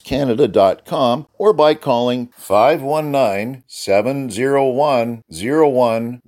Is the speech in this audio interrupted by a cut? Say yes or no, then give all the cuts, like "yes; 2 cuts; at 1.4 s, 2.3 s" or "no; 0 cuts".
yes; 1 cut; at 1.3 s